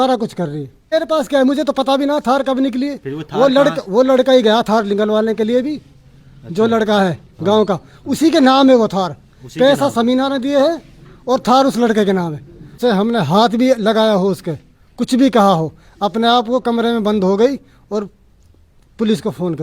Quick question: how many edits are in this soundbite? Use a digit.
2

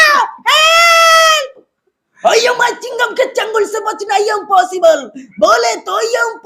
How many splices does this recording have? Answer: 0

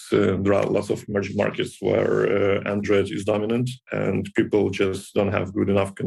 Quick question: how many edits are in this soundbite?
0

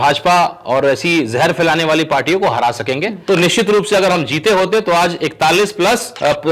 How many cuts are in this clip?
1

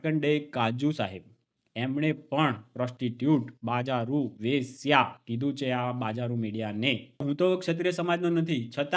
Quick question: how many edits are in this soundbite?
1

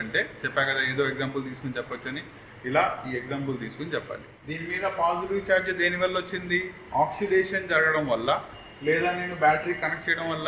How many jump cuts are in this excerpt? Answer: 1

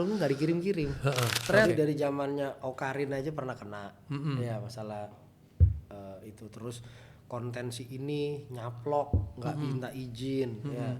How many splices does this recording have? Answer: 1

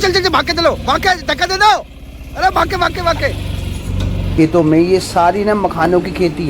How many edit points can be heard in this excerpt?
1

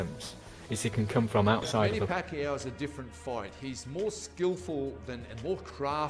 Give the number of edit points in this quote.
1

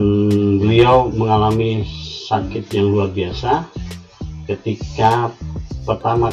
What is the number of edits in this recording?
0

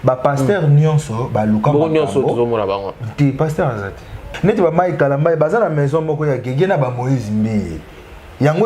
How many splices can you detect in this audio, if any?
1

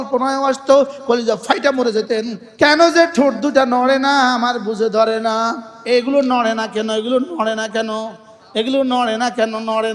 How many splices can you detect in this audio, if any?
2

